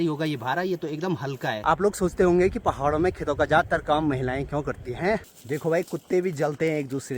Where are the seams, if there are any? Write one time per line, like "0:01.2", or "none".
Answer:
0:01.6
0:05.2